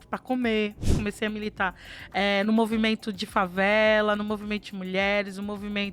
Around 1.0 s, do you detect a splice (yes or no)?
yes